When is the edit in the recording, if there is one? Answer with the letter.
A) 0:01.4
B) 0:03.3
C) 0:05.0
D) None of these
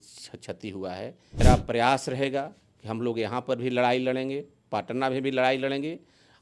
A